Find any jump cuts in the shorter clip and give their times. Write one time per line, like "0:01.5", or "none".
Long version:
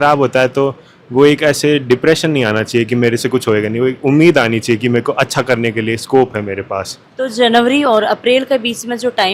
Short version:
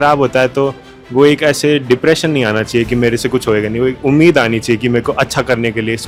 none